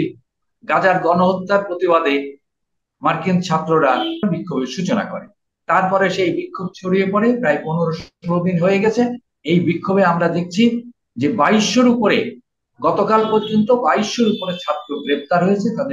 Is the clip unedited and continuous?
no; 1 cut; at 4.2 s

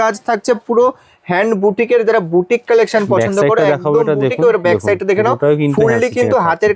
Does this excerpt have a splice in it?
no; 0 cuts

